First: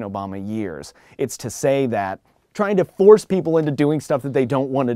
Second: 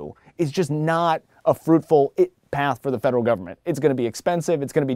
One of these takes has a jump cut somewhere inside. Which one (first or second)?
first